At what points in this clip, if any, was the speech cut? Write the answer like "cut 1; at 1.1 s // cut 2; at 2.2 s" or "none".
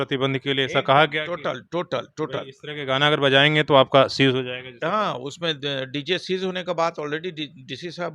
none